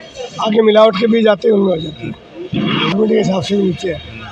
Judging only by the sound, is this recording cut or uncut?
cut